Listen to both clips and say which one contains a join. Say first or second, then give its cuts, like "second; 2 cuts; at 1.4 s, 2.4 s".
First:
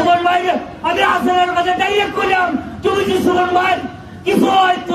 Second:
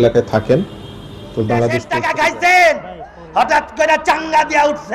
second; 1 cut; at 1.9 s